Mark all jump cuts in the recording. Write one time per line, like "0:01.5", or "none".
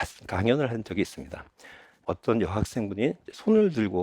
0:02.1